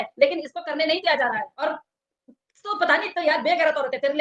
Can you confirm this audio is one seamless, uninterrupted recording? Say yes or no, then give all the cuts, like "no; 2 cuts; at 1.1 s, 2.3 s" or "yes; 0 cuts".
no; 1 cut; at 1.6 s